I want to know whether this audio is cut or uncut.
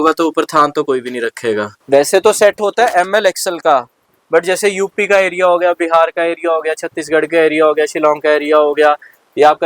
cut